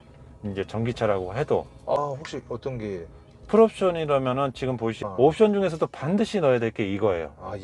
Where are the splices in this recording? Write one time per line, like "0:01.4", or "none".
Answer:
0:02.0
0:05.0

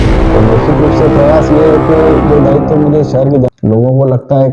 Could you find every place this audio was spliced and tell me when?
0:03.5

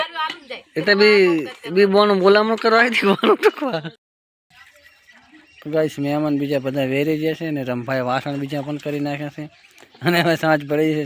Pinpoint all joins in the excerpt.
0:04.0

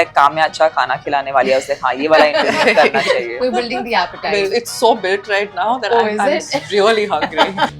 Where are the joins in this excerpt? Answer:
0:03.3
0:04.5

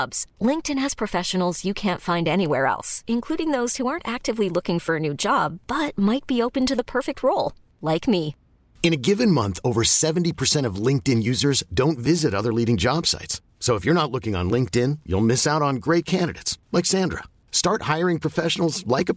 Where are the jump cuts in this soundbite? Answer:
none

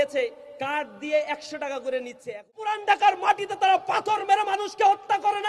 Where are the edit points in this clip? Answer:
0:02.8

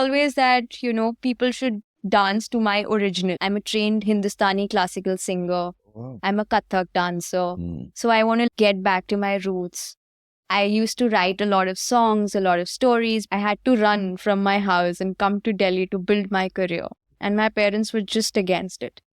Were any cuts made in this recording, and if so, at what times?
0:03.4
0:08.5
0:13.2

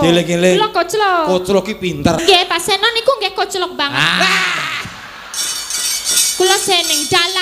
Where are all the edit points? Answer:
0:02.2

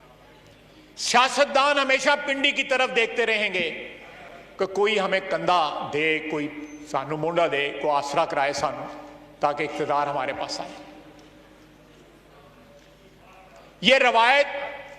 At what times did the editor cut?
none

